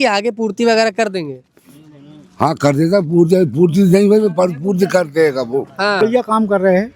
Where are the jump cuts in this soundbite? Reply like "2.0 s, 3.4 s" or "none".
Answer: 6.0 s